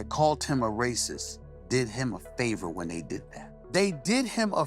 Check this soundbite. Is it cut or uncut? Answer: uncut